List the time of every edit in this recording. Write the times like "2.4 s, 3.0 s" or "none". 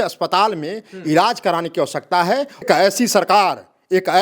2.6 s

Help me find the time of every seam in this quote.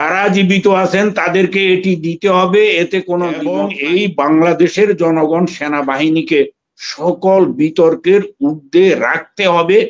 3.7 s

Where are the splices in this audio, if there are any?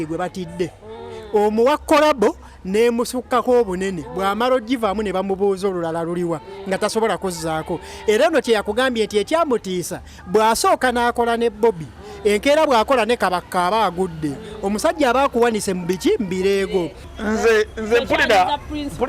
17.0 s

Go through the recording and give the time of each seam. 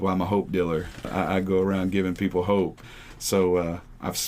1.0 s, 2.8 s

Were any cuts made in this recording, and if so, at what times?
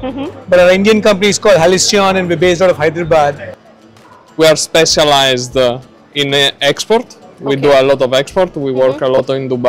3.5 s

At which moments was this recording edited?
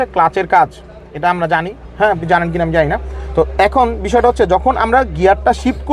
none

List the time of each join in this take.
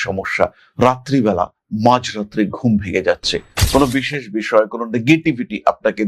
none

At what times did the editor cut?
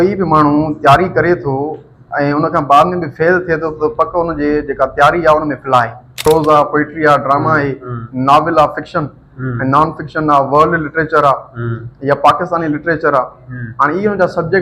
6.1 s

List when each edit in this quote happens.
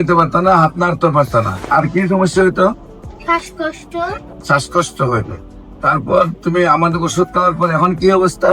1.6 s, 4.3 s

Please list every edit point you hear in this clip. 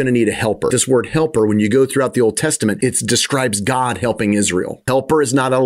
0.7 s, 2.8 s, 4.8 s

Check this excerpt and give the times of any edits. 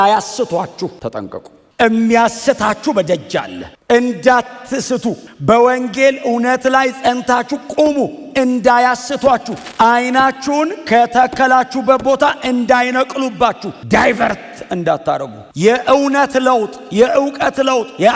5.3 s, 9.6 s

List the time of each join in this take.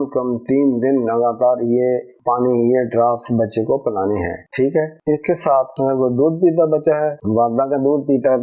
none

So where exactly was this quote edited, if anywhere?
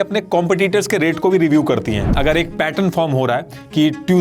2.1 s

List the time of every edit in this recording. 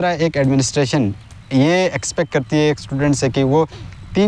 none

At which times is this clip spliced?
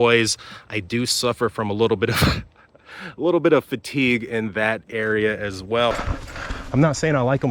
5.9 s

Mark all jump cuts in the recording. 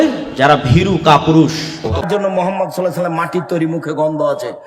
1.6 s

